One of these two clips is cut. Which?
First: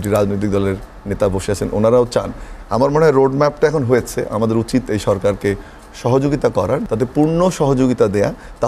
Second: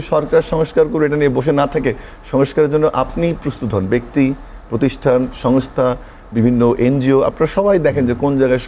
first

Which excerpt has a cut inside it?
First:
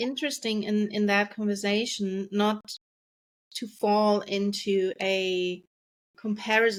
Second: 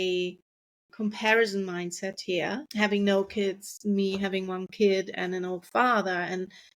second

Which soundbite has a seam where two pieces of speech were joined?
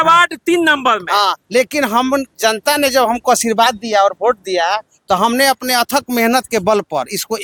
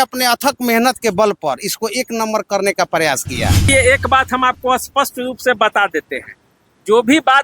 second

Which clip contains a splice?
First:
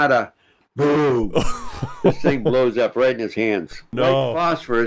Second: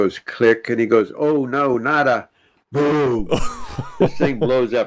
first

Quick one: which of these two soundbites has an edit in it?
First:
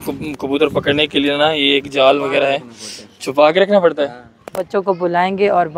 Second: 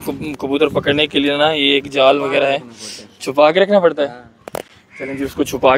first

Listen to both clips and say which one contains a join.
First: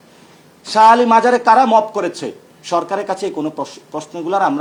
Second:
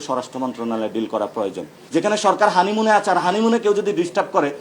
second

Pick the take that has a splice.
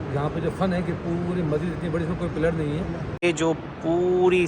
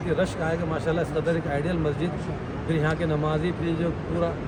first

